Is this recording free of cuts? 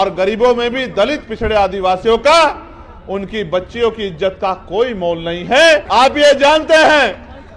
no; 1 cut; at 5.8 s

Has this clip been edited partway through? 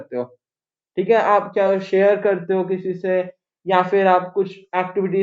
no; 0 cuts

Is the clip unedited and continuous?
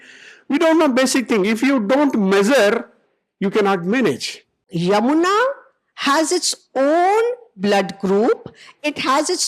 no; 1 cut; at 4.6 s

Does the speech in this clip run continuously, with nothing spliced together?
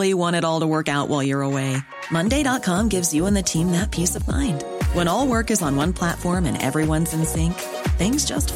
yes; 0 cuts

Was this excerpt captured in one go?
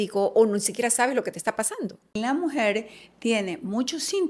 no; 1 cut; at 2.2 s

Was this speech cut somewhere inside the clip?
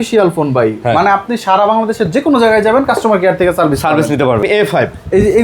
yes; 1 cut; at 4.4 s

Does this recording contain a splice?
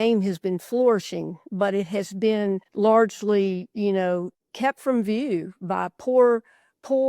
yes; 2 cuts; at 2.7 s, 4.4 s

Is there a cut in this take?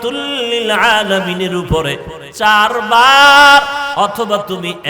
no; 0 cuts

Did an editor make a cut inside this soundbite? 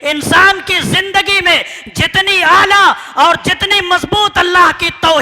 no; 0 cuts

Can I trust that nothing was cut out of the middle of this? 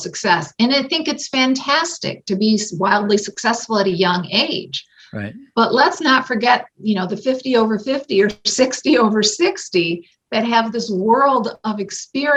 yes; 0 cuts

